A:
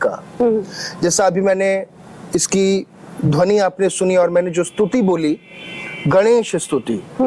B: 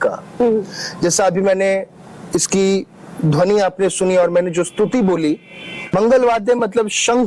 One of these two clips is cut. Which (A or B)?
B